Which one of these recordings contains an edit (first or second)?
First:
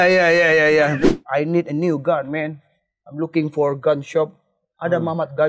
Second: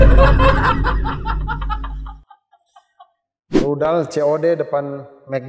first